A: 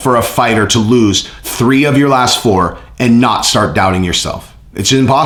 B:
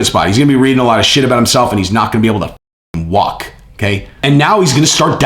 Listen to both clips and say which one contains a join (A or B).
B